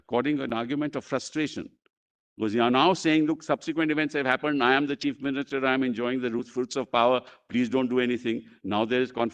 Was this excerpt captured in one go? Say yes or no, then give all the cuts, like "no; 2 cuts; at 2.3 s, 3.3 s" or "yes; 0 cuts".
yes; 0 cuts